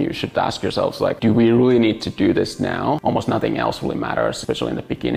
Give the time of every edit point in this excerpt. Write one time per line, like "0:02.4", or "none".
0:03.0
0:04.4